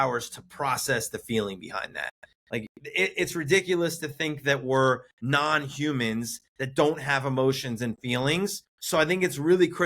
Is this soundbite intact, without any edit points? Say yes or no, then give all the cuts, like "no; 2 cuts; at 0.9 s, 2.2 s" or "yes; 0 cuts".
no; 1 cut; at 8.7 s